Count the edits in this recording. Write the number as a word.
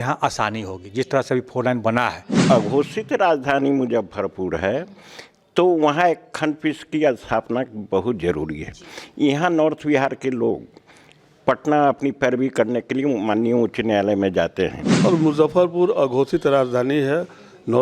two